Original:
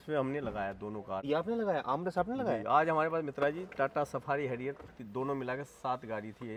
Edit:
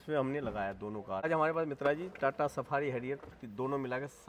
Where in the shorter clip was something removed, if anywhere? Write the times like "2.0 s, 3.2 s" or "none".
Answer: 1.3 s

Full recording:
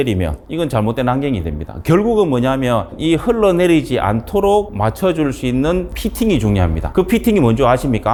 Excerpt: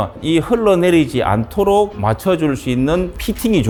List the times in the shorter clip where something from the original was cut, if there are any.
none

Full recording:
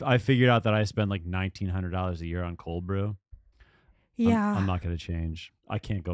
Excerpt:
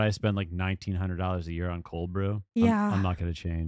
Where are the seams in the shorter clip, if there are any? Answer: 2.4 s

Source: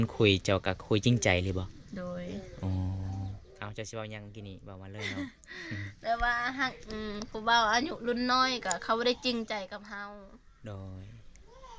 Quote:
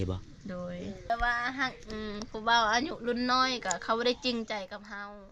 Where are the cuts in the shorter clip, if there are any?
1.1 s

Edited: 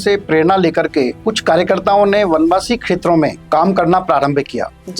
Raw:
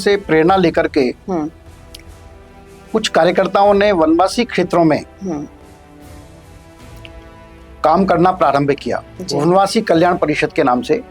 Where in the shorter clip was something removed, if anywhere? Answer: 1.2 s, 3.4 s

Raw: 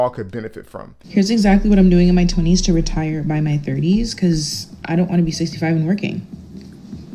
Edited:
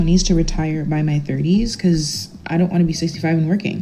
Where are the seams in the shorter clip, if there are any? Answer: none

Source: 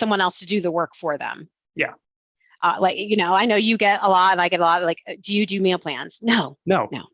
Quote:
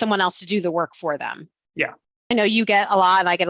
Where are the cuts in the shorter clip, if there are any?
2.3 s

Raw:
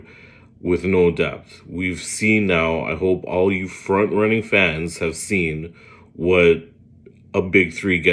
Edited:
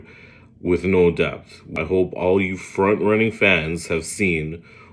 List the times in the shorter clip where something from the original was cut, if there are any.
1.7 s

